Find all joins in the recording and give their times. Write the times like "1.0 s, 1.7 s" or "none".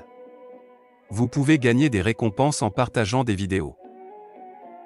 none